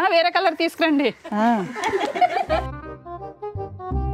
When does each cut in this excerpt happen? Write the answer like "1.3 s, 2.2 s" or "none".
2.6 s

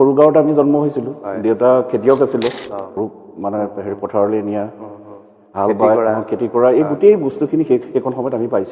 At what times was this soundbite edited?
3.0 s

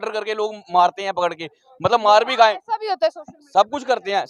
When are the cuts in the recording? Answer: none

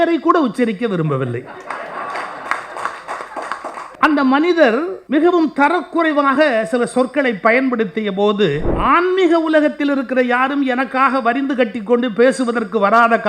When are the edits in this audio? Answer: 3.9 s, 5.0 s, 8.7 s

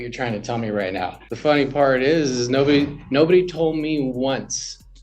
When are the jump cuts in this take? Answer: 1.2 s

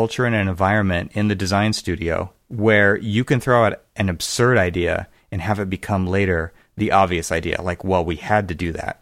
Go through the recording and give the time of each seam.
2.4 s

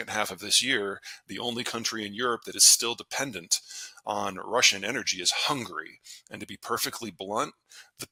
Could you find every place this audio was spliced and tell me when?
none

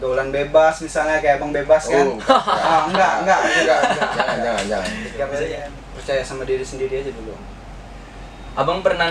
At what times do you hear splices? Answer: 5.5 s

